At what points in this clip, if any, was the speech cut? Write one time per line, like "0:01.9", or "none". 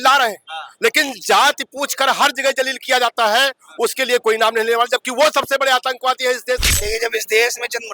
0:06.6